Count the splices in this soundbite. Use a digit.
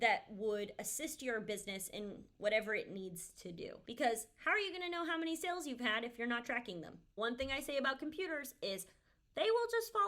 2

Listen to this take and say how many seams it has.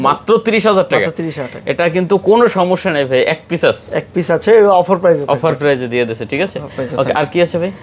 0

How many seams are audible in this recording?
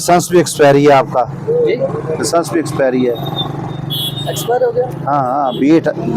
0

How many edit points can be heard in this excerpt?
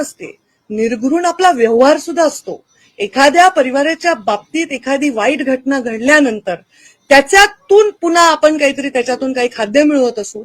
0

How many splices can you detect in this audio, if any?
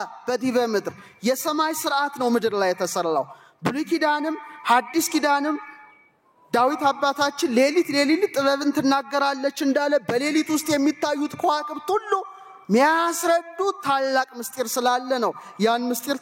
0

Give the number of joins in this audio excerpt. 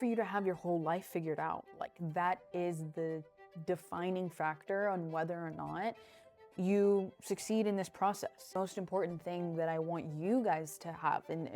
2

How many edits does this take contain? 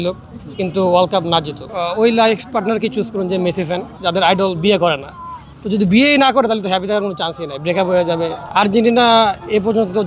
3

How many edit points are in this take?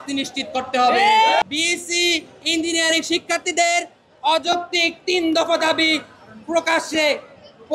1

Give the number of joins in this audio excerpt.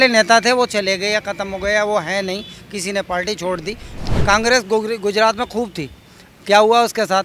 1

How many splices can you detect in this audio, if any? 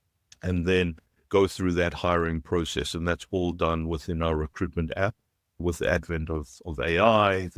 1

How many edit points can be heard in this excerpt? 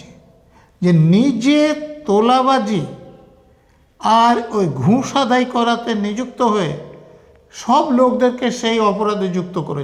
0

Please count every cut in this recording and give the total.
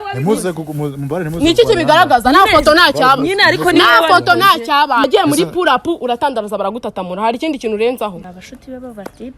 2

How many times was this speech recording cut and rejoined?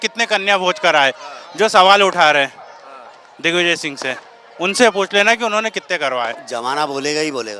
1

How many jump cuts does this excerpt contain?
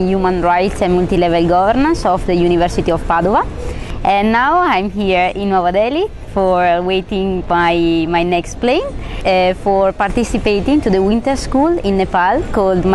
1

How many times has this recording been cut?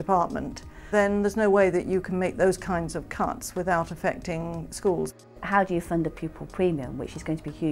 2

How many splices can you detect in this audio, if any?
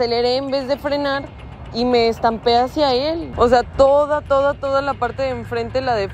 1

